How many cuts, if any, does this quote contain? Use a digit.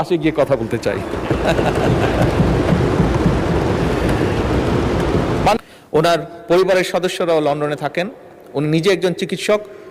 1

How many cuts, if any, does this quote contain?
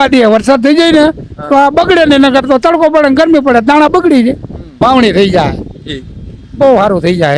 1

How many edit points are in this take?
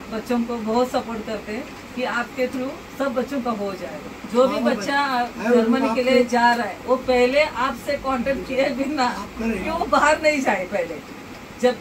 1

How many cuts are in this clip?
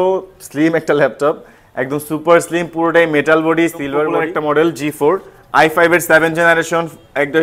1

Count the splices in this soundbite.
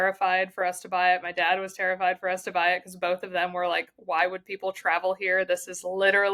0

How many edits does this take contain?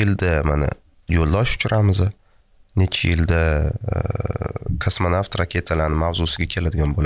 0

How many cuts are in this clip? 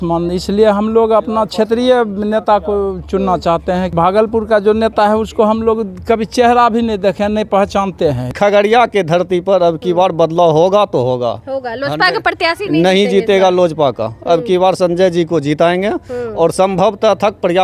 2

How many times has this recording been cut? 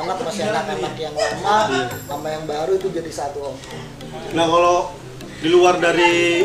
0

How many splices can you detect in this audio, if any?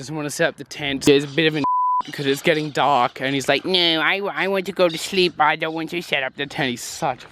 1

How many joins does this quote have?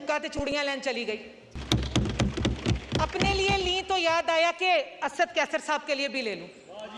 1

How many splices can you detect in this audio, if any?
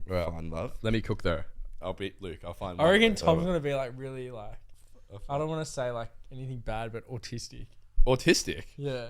1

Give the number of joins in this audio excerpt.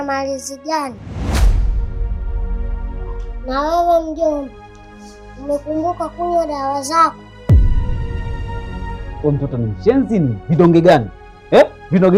0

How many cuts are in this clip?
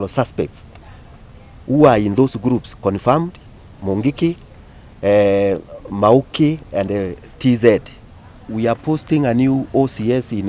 1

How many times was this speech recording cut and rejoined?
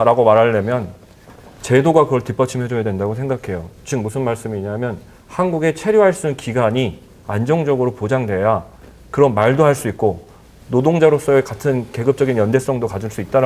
0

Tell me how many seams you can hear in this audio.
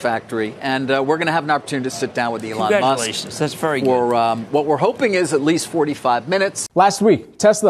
1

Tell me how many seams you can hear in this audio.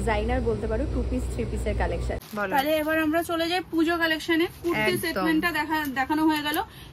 1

